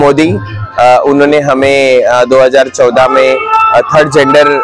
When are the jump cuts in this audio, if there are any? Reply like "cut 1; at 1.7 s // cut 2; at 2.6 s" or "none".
none